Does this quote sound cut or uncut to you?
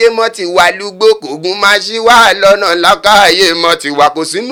uncut